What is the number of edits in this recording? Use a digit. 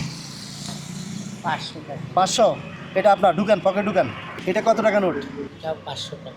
2